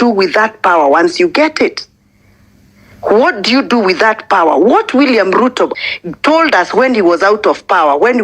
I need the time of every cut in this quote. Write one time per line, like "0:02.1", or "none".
0:05.8